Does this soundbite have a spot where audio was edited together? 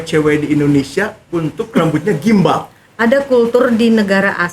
yes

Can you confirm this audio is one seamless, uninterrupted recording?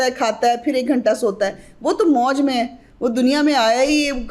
yes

